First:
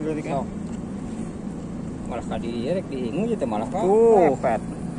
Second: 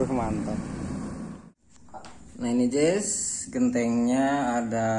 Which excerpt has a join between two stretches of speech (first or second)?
second